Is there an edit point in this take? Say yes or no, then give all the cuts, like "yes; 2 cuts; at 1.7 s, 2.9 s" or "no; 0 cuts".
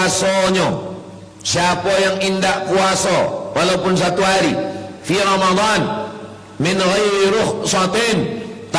no; 0 cuts